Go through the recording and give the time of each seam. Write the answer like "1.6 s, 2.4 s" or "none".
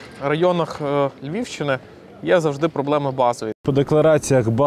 3.6 s